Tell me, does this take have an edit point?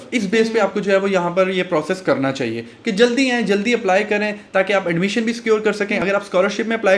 no; 0 cuts

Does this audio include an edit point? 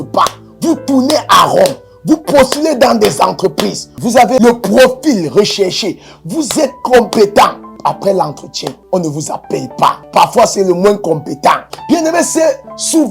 yes; 4 cuts; at 7.7 s, 8.8 s, 10.0 s, 11.7 s

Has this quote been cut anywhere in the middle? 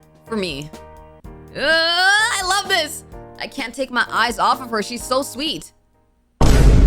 no; 0 cuts

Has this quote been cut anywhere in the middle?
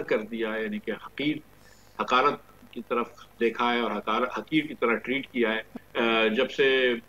yes; 1 cut; at 5.8 s

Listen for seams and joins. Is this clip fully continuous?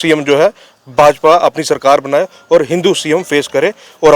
yes; 0 cuts

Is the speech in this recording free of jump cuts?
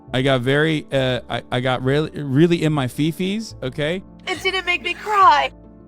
no; 1 cut; at 4.0 s

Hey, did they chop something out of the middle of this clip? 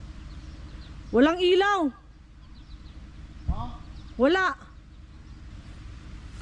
yes; 1 cut; at 5.5 s

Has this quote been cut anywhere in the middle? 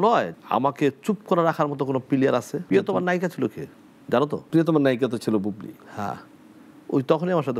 yes; 2 cuts; at 2.7 s, 4.4 s

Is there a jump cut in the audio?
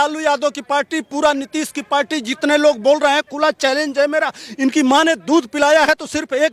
no; 0 cuts

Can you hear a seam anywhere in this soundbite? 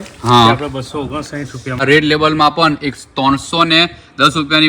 yes; 1 cut; at 1.8 s

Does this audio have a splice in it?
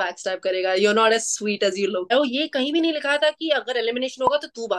yes; 1 cut; at 2.1 s

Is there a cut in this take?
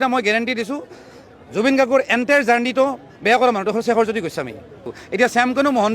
yes; 1 cut; at 5.0 s

